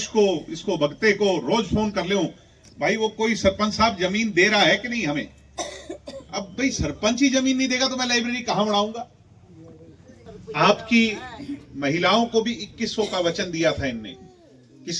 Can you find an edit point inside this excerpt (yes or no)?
yes